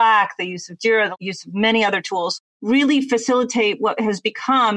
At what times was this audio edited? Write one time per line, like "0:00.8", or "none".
0:01.1
0:02.4

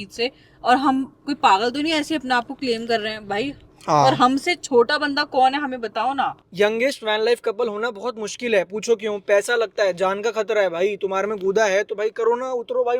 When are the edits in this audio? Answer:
0:03.6
0:06.3

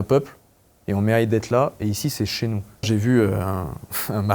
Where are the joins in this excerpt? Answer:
0:02.9

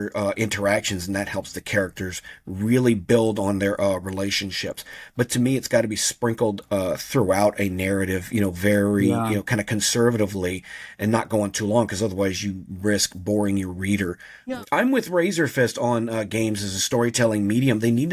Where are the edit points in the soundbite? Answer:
0:14.3

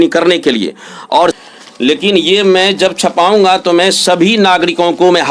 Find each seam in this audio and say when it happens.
0:01.4

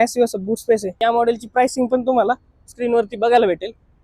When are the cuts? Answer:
0:00.9

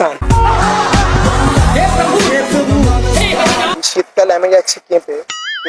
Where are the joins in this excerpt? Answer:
0:03.7

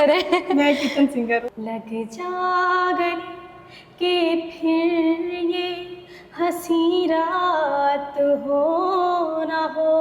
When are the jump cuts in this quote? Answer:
0:01.5

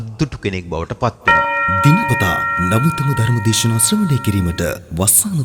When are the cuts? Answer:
0:01.3

